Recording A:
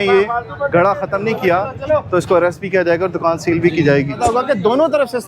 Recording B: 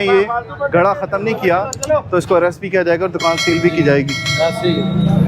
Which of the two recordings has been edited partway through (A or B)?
A